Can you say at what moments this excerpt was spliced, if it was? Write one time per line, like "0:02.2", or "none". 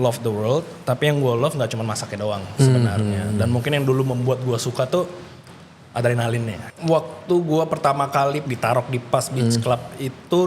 0:06.6
0:08.4